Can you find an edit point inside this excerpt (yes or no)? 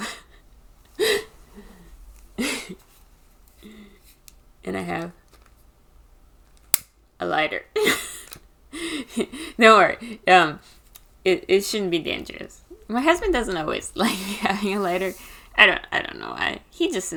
no